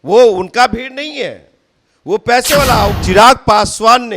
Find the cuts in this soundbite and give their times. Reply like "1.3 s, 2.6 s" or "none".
3.0 s